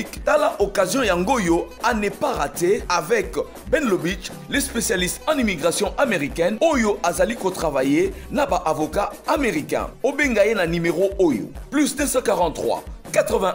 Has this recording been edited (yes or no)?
no